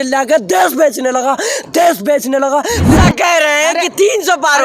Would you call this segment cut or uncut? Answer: cut